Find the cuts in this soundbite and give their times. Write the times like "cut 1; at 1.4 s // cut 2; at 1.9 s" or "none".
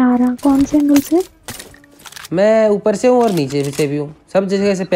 none